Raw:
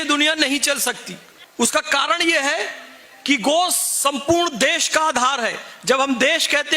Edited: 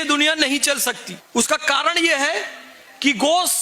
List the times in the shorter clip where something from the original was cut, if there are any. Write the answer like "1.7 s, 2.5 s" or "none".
1.1 s